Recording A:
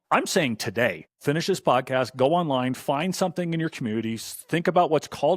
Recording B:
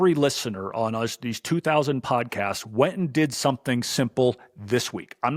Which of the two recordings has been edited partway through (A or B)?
A